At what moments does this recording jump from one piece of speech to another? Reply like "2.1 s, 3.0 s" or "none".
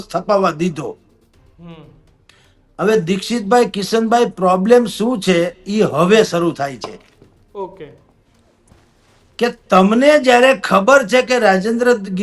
none